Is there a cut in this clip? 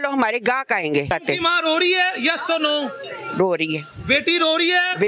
yes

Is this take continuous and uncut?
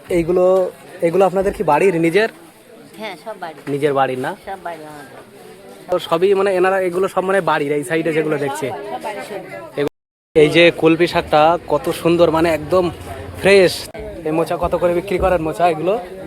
no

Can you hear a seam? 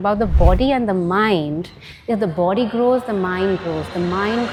no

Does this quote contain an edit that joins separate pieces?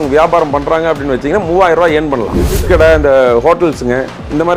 yes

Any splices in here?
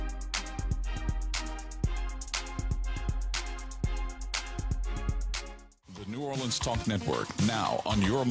yes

